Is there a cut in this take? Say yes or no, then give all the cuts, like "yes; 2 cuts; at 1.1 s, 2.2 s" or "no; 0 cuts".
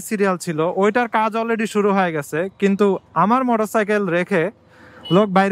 no; 0 cuts